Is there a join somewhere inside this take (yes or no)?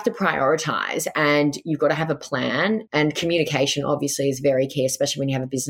yes